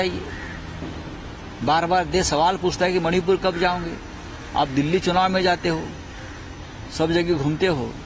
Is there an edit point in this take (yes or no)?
no